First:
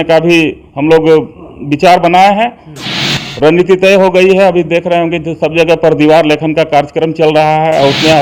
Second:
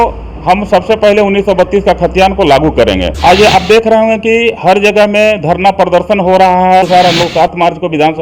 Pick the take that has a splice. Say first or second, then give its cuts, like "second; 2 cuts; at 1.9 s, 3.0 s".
second; 2 cuts; at 3.1 s, 6.8 s